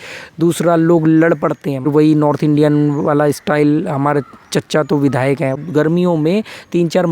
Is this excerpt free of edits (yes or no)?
no